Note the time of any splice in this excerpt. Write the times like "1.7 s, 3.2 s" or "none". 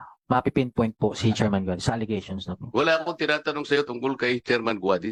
none